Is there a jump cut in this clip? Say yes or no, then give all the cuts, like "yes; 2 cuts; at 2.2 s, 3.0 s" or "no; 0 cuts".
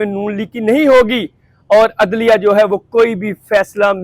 no; 0 cuts